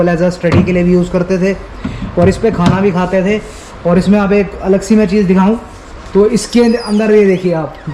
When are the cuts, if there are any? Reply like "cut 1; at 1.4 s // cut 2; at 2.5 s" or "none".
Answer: none